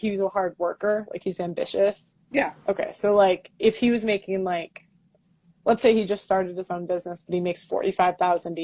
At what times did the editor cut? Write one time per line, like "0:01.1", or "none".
0:01.3
0:02.1